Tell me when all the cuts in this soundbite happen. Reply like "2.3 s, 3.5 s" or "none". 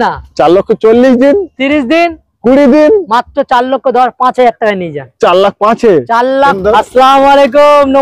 6.6 s